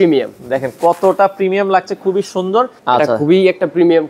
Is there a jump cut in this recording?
yes; 1 cut; at 2.8 s

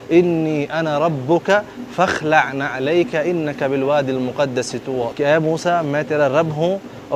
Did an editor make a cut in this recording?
no; 0 cuts

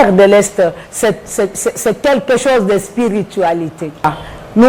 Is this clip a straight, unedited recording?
yes; 0 cuts

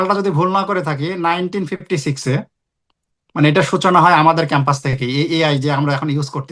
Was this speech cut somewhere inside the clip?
no; 0 cuts

